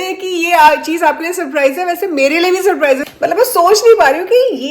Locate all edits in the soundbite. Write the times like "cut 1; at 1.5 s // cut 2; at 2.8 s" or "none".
cut 1; at 3.1 s